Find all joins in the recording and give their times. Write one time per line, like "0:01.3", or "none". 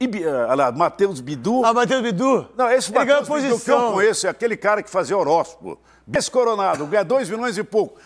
0:06.1